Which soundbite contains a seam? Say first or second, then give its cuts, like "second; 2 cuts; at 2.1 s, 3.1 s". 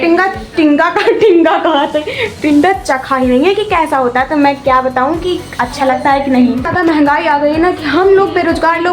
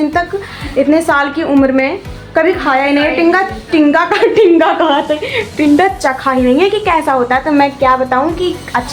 first; 1 cut; at 6.7 s